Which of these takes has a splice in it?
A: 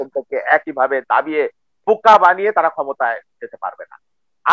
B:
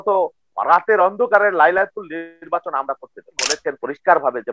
B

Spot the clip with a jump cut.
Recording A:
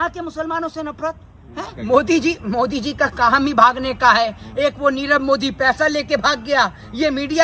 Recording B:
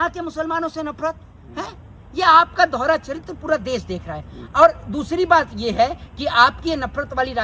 A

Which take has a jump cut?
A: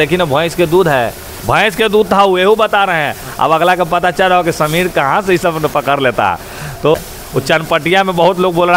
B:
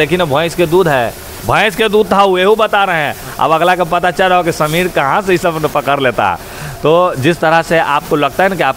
A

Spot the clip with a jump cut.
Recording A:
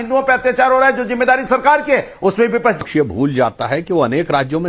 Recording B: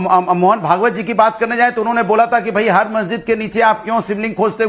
A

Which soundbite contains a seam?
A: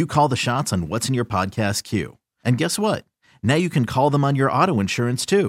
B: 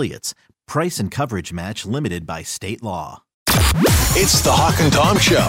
B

